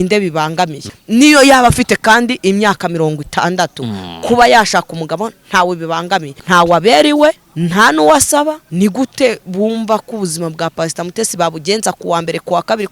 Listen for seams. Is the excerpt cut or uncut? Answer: cut